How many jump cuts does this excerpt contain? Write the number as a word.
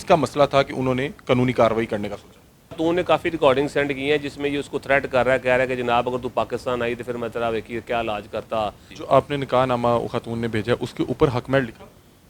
two